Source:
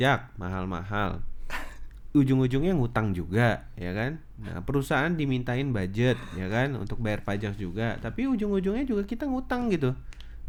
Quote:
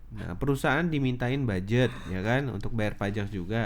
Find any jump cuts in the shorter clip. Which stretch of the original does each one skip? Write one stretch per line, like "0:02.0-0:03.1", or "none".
none